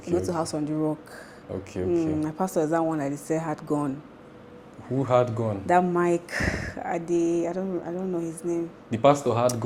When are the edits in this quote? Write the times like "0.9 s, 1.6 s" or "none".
none